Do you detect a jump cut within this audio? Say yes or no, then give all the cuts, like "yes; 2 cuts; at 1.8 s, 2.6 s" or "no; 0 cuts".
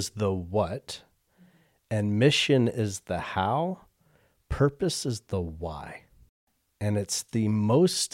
yes; 1 cut; at 6.5 s